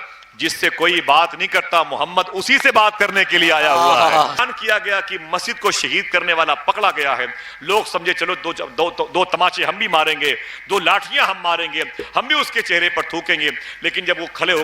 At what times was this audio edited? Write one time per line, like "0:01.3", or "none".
0:04.4